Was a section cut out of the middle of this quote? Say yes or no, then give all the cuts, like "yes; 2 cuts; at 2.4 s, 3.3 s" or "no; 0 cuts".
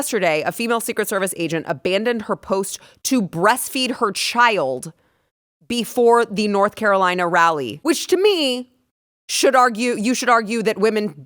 yes; 1 cut; at 7.7 s